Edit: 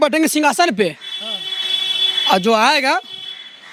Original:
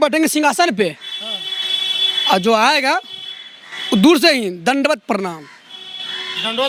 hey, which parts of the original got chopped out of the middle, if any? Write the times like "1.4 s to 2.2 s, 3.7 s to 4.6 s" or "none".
none